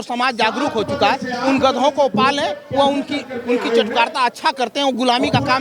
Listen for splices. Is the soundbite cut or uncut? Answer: uncut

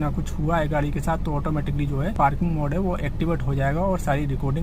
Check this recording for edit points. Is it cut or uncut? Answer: cut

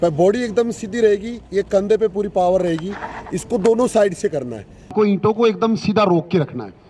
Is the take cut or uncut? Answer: cut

